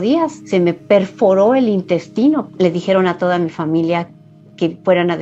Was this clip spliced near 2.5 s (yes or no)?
yes